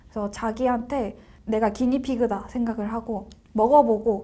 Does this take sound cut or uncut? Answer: cut